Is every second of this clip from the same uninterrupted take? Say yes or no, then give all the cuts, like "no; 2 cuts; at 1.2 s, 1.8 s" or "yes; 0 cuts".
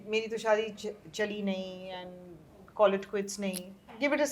yes; 0 cuts